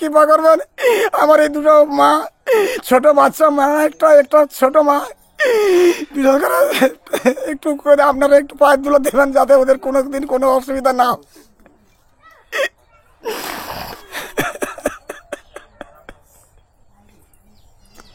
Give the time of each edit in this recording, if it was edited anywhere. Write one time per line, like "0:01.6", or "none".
none